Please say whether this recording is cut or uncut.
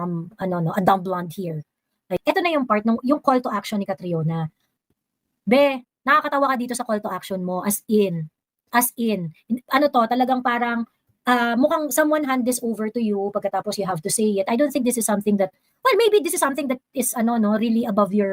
cut